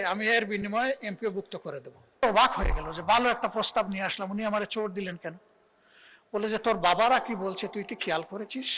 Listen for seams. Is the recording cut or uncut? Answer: cut